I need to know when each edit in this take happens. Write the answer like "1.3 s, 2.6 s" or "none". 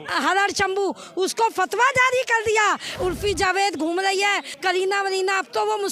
2.9 s, 4.5 s